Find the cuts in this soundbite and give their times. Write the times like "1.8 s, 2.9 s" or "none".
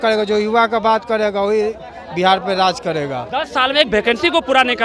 3.2 s